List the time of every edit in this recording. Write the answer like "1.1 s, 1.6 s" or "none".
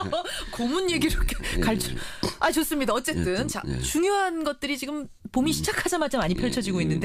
3.2 s